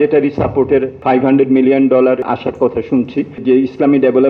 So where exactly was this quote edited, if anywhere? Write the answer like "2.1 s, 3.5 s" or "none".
0.9 s, 2.2 s, 3.4 s